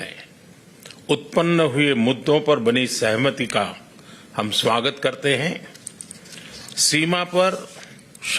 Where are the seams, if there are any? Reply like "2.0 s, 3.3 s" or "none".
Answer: none